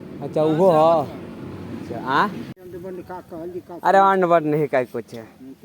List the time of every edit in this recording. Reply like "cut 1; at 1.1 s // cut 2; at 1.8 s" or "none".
cut 1; at 2.6 s